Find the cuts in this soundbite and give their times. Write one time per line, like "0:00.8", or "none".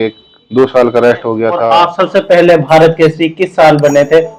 0:01.7